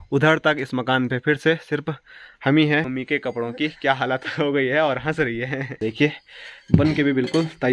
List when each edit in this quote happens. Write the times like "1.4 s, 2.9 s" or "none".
2.9 s, 5.8 s